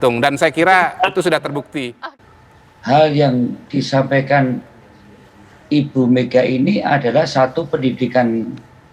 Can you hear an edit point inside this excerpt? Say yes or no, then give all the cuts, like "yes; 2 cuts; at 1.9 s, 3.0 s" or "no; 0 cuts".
yes; 1 cut; at 2.4 s